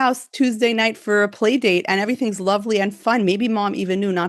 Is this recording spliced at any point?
yes; 2 cuts; at 1.0 s, 3.0 s

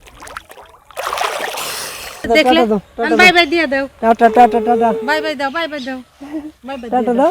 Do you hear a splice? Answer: yes; 1 cut; at 2.2 s

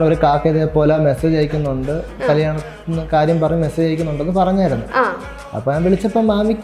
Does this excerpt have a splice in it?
no; 0 cuts

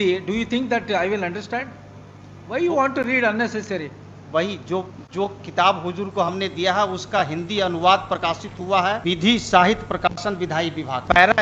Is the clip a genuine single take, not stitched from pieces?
yes; 0 cuts

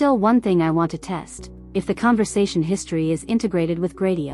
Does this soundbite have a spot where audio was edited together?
no; 0 cuts

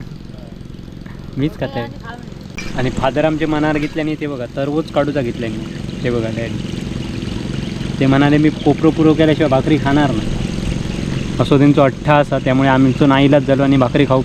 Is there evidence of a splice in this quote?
yes; 1 cut; at 2.6 s

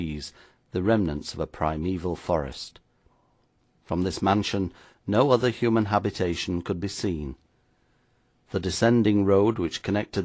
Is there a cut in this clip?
yes; 1 cut; at 6.6 s

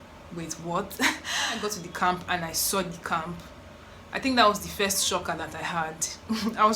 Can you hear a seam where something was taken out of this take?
yes; 1 cut; at 1.6 s

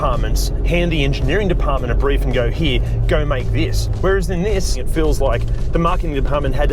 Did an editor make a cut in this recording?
yes; 1 cut; at 4.8 s

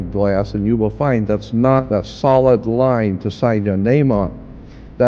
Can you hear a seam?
yes; 1 cut; at 1.9 s

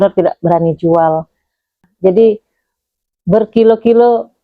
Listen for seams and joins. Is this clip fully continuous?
no; 1 cut; at 1.8 s

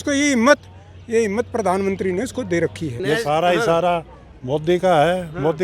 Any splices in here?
yes; 1 cut; at 2.9 s

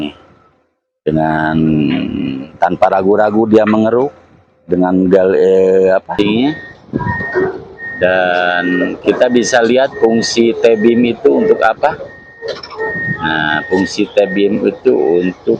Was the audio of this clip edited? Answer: yes; 1 cut; at 6.1 s

